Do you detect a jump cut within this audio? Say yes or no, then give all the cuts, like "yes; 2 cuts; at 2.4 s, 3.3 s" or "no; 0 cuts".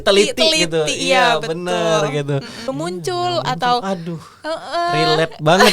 yes; 1 cut; at 2.6 s